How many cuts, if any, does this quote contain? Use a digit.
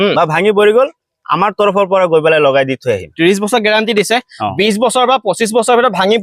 1